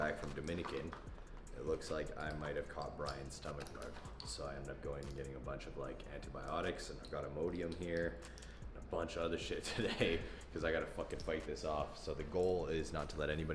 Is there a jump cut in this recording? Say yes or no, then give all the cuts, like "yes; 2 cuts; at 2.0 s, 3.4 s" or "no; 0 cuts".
no; 0 cuts